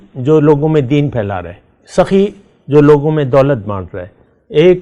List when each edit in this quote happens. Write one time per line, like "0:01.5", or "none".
none